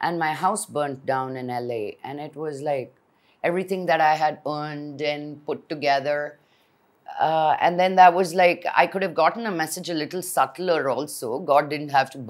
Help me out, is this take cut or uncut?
uncut